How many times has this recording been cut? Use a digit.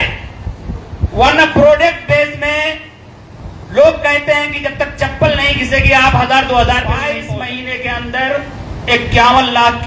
1